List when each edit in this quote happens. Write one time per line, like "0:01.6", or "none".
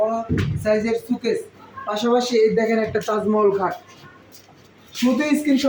none